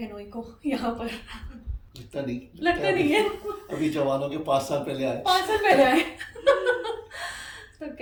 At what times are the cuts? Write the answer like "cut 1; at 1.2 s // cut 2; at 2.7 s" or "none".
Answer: none